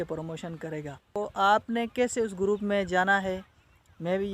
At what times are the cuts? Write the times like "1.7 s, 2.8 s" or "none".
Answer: 1.2 s